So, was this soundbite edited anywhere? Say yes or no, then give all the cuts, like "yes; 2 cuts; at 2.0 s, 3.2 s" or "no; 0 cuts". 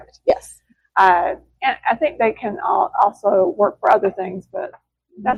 no; 0 cuts